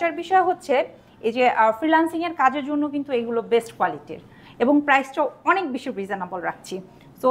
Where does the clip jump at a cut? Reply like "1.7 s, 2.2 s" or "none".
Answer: none